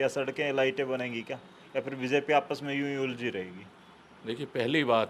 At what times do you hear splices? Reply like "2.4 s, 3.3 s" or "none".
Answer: none

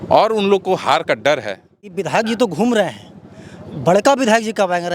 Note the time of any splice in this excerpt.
2.0 s

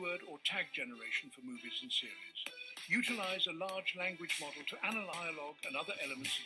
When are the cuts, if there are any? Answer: 5.1 s

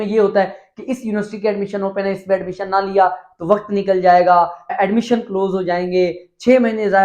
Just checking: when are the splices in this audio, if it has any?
4.7 s

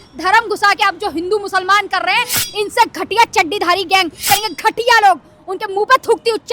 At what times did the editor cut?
4.2 s

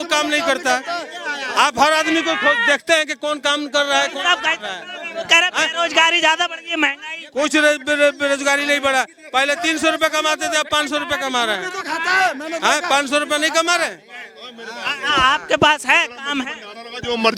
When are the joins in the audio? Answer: none

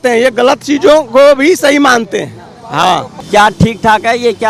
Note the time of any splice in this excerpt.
none

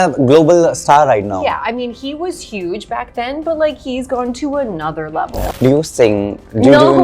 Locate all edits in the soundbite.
5.5 s

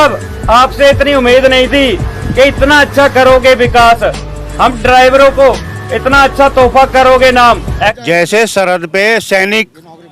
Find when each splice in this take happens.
7.7 s

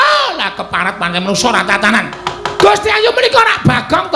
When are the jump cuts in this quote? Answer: 2.2 s

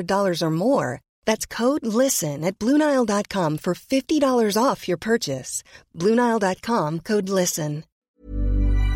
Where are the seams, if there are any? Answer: 8.0 s

